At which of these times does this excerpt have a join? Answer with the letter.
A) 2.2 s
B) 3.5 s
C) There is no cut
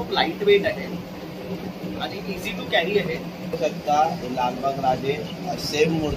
B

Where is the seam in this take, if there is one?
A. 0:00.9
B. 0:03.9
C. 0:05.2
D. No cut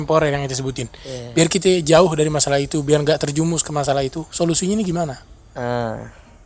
D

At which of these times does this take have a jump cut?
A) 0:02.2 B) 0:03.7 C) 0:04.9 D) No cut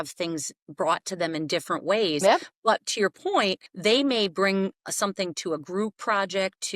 B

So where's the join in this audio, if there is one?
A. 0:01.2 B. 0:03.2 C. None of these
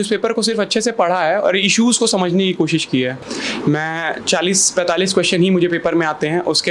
B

